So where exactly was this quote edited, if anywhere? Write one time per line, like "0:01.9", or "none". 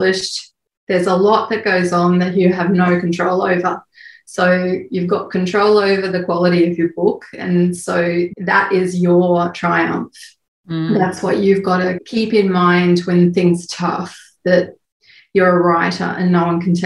0:12.0